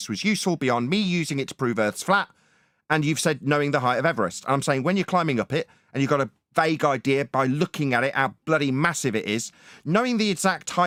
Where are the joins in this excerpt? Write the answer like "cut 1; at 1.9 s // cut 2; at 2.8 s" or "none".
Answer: none